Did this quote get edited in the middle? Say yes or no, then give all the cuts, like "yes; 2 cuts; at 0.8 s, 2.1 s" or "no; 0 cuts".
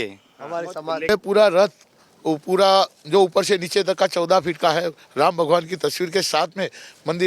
yes; 1 cut; at 1.1 s